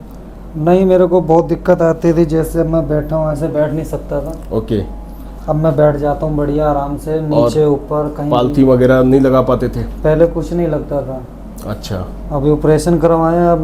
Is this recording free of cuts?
yes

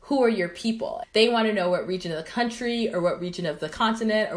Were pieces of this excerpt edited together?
yes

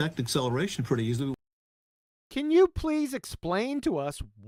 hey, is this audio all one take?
yes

